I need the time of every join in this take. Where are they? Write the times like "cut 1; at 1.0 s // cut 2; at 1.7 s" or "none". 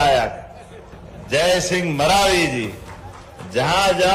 none